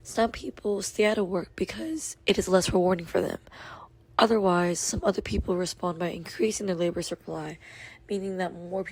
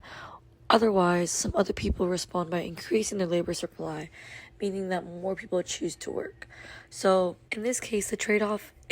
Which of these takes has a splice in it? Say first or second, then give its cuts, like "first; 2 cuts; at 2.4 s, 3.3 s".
second; 1 cut; at 7.5 s